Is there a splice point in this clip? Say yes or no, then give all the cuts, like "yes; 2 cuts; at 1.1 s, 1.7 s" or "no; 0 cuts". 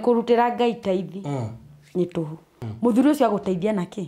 yes; 1 cut; at 2.6 s